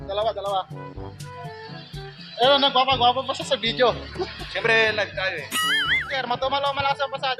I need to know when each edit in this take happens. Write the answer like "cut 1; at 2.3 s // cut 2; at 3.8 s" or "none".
cut 1; at 6.1 s